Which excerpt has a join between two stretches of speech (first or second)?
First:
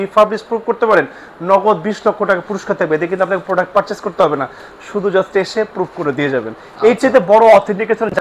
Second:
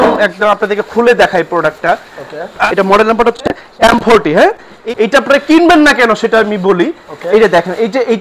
second